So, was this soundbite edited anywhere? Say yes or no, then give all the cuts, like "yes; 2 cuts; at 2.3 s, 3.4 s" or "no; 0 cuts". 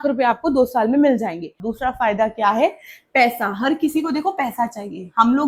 yes; 1 cut; at 1.6 s